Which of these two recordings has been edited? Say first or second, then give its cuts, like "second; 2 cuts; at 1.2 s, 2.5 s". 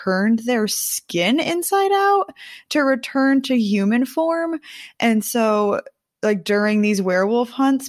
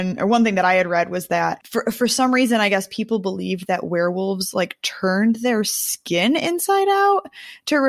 second; 1 cut; at 1.6 s